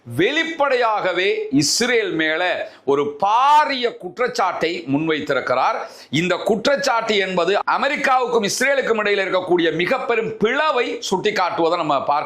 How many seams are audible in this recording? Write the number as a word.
zero